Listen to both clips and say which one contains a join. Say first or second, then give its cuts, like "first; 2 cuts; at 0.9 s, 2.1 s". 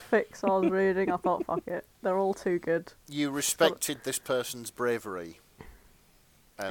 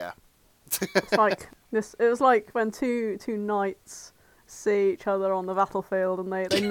second; 1 cut; at 1.5 s